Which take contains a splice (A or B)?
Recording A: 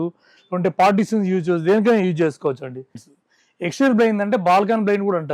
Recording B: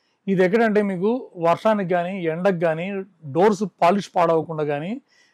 A